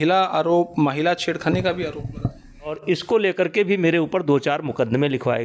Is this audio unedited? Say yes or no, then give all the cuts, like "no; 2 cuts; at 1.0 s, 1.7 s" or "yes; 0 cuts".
no; 1 cut; at 2.8 s